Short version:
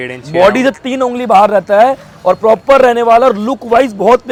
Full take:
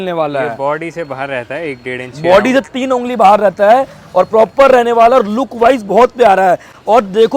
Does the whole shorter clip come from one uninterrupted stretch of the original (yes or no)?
yes